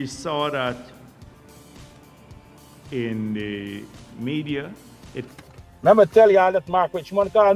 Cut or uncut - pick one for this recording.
cut